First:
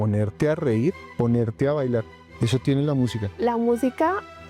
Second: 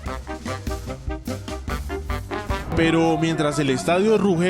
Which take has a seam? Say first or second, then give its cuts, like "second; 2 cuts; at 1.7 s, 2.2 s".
second; 1 cut; at 2.7 s